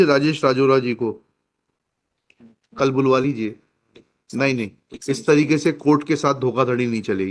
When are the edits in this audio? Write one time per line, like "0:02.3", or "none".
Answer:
none